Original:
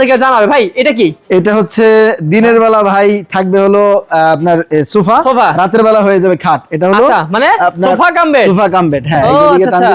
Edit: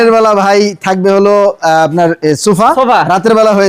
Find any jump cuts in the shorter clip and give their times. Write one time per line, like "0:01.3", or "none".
none